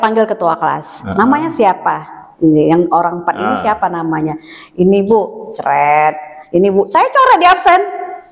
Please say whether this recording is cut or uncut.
uncut